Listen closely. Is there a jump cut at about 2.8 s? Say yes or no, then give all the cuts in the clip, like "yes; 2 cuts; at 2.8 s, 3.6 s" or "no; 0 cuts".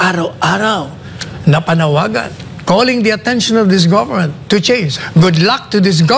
no; 1 cut; at 4.9 s